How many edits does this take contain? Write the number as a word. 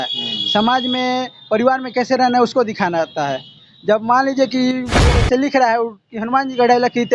one